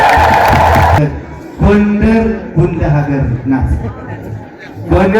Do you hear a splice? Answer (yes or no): yes